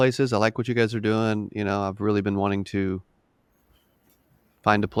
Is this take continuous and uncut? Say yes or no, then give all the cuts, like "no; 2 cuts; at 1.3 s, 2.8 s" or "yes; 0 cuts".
yes; 0 cuts